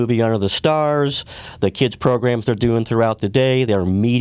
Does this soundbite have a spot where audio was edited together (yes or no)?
no